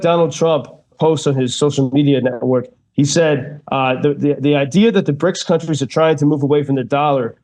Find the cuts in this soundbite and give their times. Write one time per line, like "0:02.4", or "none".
0:01.0